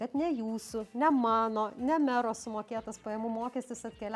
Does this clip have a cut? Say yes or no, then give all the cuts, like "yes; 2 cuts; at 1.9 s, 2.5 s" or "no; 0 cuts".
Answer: no; 0 cuts